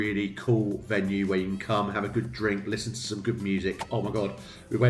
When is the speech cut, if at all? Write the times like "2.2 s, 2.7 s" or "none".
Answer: 3.8 s